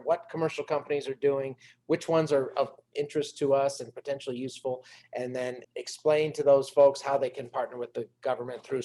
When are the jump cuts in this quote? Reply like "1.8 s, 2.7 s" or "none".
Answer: 5.7 s